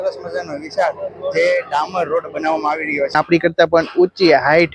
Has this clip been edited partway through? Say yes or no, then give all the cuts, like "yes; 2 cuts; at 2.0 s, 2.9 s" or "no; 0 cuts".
yes; 1 cut; at 3.1 s